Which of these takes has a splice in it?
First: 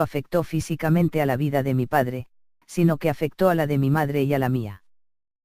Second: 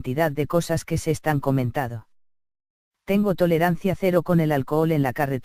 first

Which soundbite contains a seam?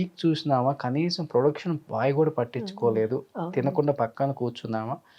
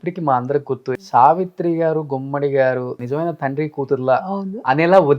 second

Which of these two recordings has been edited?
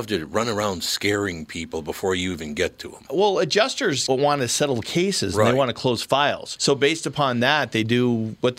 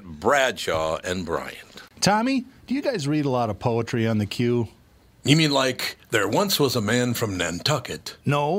second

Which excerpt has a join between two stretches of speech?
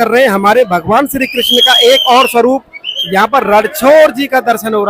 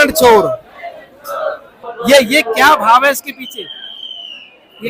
second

